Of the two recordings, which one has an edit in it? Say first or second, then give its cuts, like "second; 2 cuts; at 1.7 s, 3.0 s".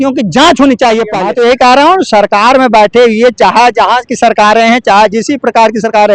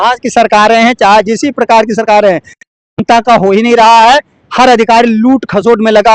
first; 1 cut; at 1.1 s